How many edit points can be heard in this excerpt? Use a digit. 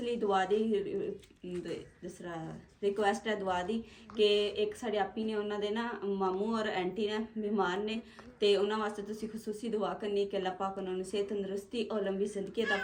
0